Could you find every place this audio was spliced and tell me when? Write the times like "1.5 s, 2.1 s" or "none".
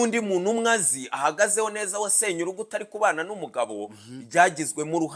none